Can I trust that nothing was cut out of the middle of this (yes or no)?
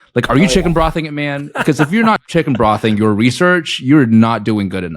no